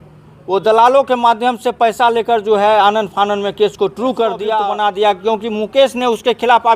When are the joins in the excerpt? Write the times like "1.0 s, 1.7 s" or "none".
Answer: 4.6 s